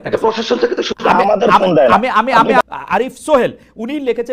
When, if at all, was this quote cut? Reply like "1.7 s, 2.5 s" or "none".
2.6 s